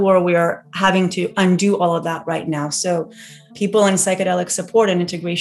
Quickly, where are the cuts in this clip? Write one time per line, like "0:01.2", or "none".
0:03.5